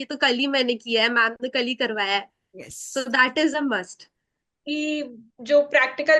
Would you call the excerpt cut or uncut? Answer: cut